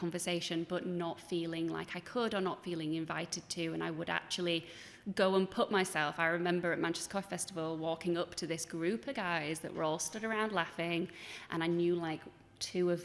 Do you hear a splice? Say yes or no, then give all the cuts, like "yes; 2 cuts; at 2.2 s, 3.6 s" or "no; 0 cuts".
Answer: no; 0 cuts